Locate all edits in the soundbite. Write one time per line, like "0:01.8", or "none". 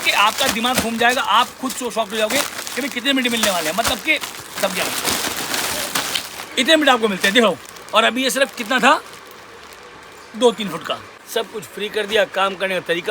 0:04.6
0:07.6
0:11.1